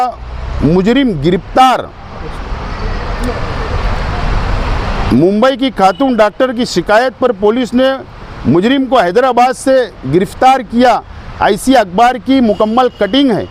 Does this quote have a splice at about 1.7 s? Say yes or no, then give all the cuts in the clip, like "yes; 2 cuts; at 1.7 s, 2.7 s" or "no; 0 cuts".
no; 0 cuts